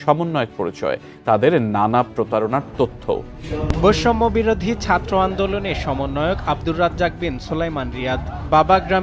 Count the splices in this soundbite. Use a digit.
1